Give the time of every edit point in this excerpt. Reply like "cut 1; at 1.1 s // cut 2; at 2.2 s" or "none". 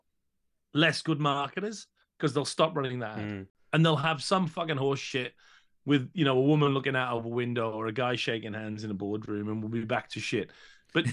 cut 1; at 3.5 s